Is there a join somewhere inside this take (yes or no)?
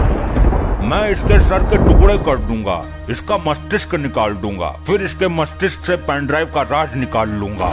no